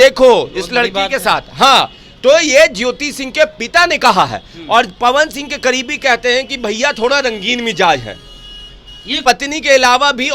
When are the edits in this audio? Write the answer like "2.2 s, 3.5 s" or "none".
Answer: 9.2 s